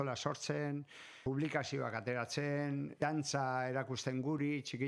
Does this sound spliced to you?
yes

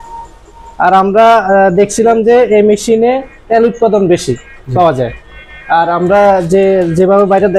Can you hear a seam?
no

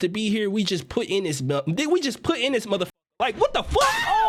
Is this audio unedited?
yes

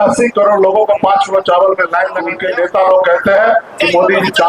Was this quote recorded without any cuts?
no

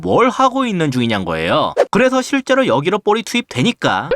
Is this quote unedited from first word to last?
no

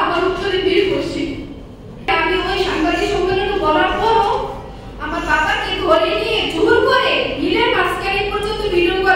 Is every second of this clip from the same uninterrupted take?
no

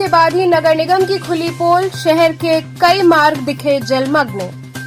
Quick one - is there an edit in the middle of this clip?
no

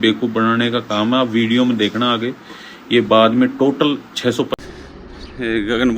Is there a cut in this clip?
yes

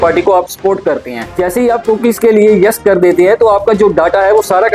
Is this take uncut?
no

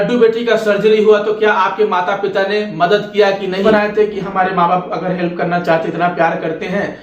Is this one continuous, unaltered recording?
no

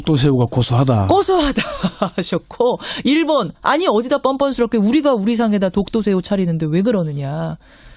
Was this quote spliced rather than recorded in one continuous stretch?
yes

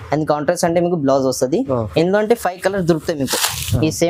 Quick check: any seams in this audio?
no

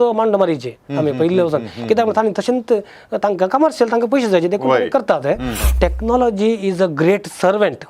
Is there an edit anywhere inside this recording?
yes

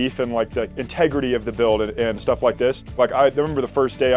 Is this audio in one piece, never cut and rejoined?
yes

